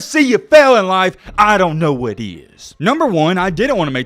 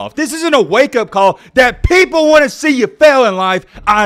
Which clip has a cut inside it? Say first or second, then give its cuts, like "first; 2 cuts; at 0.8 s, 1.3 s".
first; 1 cut; at 2.6 s